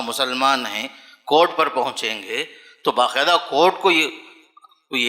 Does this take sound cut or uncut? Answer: uncut